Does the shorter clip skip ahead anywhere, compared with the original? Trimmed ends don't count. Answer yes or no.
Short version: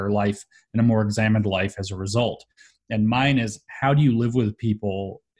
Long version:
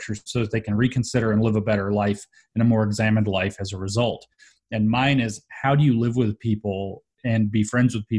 no